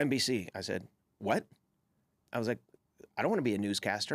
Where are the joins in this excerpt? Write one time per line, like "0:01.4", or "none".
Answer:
none